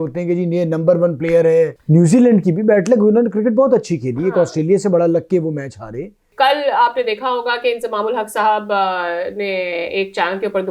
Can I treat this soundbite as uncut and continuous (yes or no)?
no